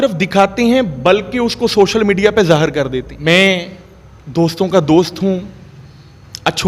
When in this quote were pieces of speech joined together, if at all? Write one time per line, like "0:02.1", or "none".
0:03.1

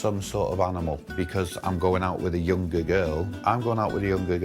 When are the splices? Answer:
0:01.0
0:03.3

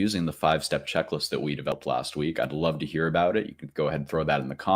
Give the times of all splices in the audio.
0:01.7

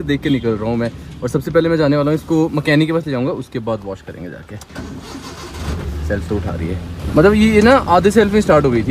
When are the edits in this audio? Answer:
none

